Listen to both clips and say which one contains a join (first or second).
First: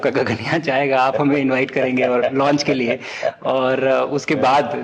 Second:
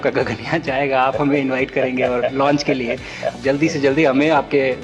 second